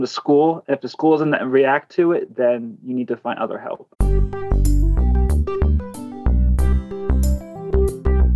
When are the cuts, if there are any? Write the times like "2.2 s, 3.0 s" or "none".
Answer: 3.9 s